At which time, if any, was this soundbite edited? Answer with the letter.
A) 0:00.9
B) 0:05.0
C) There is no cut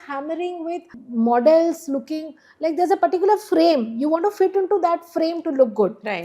A